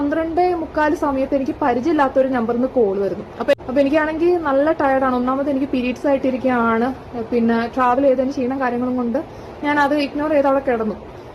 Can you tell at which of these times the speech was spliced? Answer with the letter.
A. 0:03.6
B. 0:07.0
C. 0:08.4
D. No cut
A